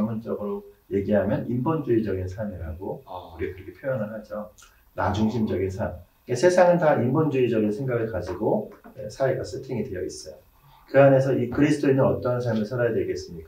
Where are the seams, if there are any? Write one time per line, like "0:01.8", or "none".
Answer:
none